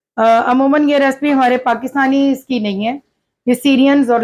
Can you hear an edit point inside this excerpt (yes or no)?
no